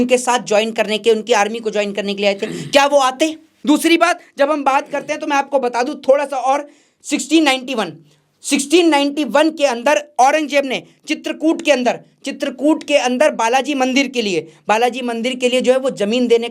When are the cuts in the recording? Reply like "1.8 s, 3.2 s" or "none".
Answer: 3.5 s